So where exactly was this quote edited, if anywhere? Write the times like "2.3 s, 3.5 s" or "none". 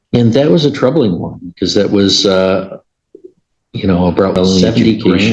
none